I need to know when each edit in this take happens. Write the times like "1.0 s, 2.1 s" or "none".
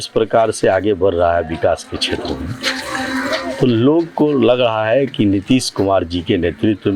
none